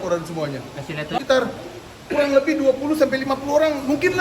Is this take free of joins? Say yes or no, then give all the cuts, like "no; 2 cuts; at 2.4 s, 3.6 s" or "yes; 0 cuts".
no; 1 cut; at 1.2 s